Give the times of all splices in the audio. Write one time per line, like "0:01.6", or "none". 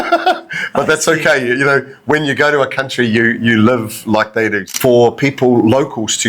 0:04.7